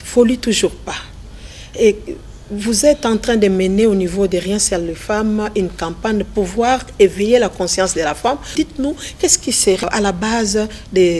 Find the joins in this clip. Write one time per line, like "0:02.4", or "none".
0:06.3
0:08.5
0:09.8

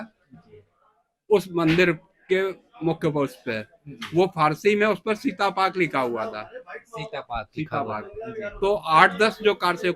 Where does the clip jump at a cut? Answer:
none

